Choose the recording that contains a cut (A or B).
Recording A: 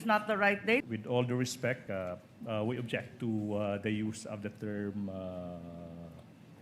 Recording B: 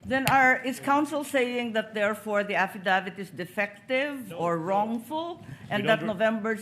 A